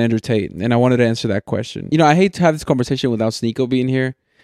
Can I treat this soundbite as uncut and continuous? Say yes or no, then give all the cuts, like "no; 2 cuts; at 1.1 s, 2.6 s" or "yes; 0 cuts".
no; 1 cut; at 1.8 s